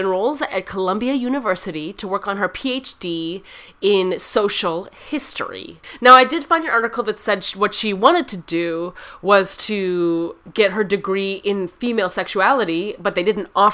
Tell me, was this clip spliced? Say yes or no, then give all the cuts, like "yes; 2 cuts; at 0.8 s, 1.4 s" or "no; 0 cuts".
no; 0 cuts